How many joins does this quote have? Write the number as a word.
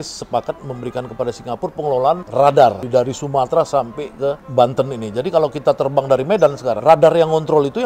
four